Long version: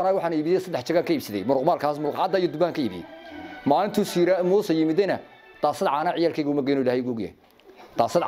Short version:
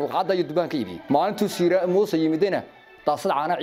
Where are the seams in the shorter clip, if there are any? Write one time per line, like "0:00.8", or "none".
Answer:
0:00.9